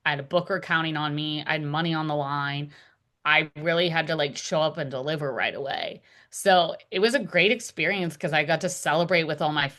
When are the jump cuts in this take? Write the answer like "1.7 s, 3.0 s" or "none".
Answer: none